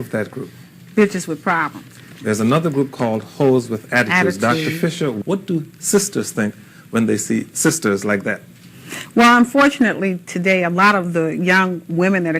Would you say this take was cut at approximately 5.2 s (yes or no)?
yes